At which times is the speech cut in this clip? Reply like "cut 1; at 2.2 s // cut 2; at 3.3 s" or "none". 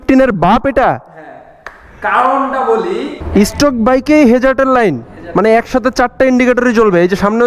cut 1; at 3.1 s